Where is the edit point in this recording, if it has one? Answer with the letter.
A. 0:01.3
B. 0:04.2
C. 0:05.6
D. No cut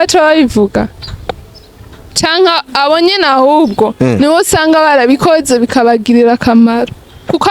D